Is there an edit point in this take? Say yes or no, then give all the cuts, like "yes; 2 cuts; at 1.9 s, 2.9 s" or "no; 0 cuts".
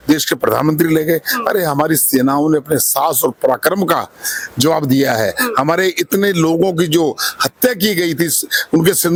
no; 0 cuts